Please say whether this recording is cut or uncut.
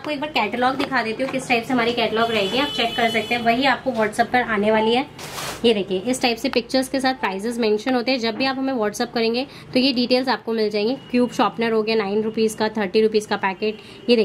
uncut